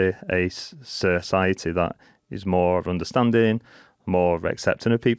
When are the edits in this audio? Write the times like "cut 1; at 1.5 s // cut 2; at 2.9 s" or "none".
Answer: none